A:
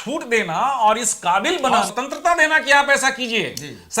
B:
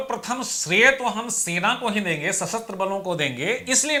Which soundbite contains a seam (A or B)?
A